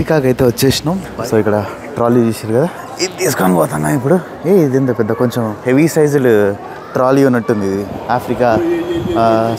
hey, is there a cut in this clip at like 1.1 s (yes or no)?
yes